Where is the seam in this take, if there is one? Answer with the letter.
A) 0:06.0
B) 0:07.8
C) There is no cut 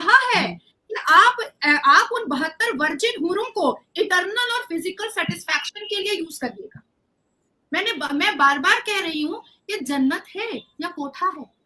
C